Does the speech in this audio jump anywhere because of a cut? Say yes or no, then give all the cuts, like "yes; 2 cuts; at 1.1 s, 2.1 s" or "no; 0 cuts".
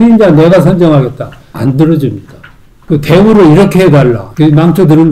yes; 2 cuts; at 2.8 s, 4.3 s